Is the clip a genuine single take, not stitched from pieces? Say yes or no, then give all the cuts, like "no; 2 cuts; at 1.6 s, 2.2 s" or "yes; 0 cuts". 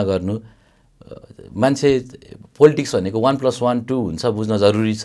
yes; 0 cuts